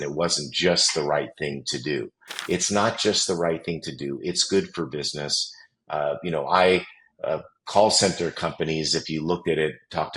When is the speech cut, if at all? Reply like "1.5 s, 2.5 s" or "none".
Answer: 2.3 s